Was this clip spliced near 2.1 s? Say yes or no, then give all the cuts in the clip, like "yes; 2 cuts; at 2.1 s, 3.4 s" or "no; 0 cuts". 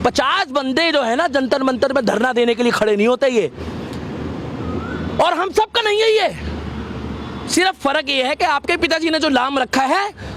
no; 0 cuts